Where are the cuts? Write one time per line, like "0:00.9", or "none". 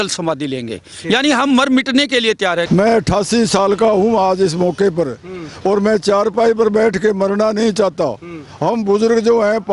0:02.7